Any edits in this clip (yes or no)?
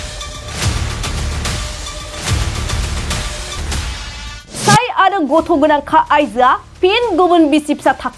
yes